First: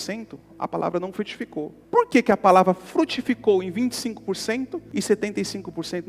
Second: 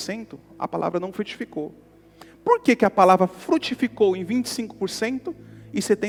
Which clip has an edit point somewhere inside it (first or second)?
first